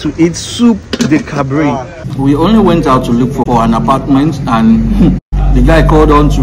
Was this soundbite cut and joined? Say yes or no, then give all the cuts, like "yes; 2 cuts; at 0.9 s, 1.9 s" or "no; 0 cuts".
yes; 3 cuts; at 2.0 s, 3.4 s, 5.3 s